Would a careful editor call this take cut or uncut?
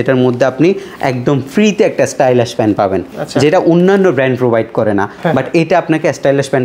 uncut